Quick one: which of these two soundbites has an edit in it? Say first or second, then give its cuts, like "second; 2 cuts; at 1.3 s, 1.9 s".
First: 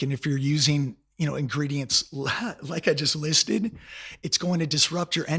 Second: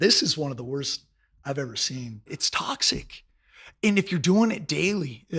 second; 1 cut; at 2.4 s